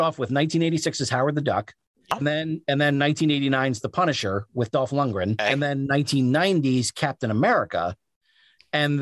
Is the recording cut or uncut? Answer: cut